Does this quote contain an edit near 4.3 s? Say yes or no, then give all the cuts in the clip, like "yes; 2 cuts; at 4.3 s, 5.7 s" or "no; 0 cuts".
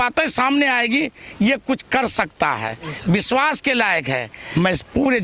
yes; 1 cut; at 4.3 s